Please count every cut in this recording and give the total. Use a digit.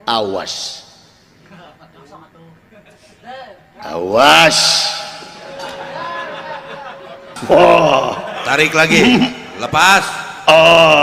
1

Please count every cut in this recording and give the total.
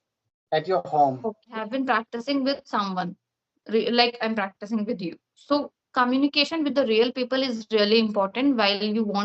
1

